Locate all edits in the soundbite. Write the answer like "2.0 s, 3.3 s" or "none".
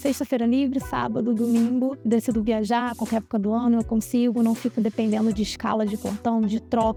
none